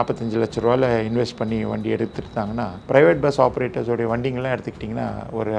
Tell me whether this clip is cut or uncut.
cut